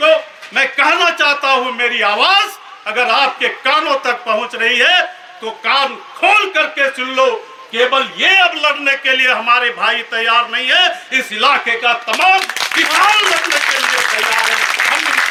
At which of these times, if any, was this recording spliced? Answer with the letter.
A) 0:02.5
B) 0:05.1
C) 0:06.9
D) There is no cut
D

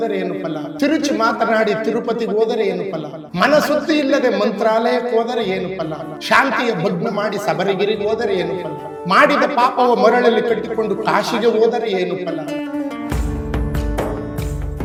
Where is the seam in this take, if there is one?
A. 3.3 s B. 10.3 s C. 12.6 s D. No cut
D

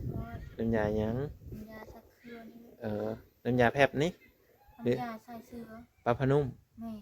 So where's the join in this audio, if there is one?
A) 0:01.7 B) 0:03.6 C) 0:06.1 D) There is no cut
D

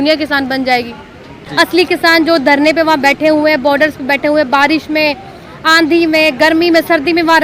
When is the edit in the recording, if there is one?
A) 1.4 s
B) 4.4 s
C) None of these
A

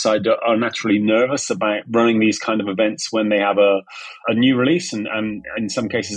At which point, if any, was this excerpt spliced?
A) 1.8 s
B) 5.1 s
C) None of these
A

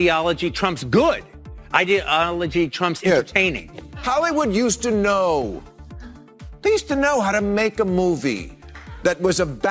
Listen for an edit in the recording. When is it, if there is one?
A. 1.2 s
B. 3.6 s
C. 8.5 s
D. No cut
B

